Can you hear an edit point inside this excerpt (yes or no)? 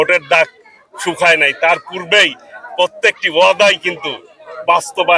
no